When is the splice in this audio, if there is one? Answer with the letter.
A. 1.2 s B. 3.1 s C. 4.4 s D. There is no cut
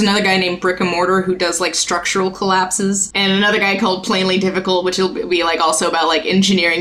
B